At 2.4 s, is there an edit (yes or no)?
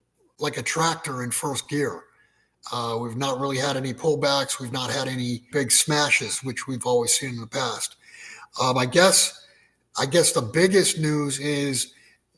no